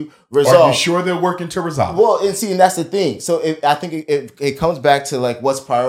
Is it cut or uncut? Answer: uncut